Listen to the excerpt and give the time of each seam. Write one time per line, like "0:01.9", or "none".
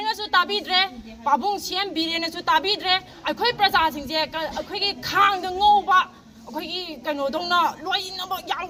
none